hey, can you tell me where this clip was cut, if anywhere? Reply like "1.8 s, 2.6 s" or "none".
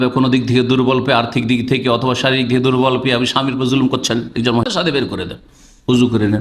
4.6 s